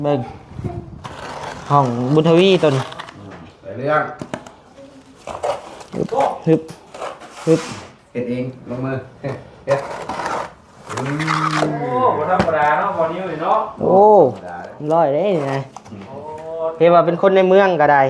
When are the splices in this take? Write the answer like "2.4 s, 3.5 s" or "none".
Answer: none